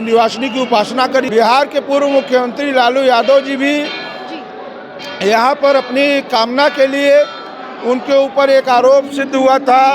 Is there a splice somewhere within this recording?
yes; 1 cut; at 1.3 s

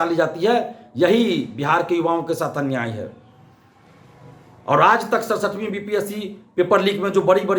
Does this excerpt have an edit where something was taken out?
no; 0 cuts

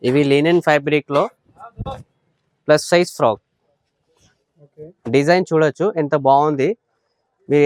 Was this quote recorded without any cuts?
yes; 0 cuts

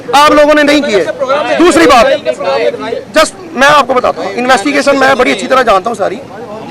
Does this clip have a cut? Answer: no; 0 cuts

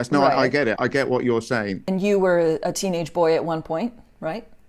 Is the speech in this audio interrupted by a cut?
yes; 1 cut; at 1.8 s

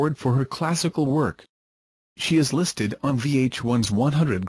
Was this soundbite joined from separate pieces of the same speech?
yes; 1 cut; at 1.7 s

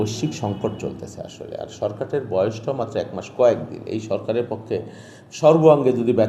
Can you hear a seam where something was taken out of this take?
no; 0 cuts

